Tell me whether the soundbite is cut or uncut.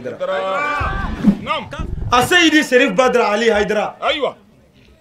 cut